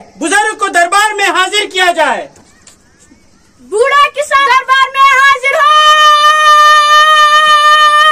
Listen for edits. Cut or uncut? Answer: uncut